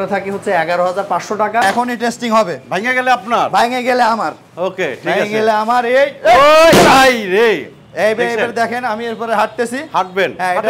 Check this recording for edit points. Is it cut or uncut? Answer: cut